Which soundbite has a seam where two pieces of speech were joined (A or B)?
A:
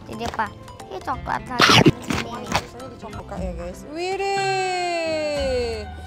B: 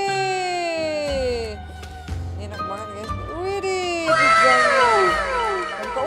A